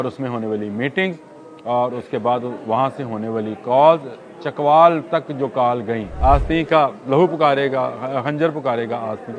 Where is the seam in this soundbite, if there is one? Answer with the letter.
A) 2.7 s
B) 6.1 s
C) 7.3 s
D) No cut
B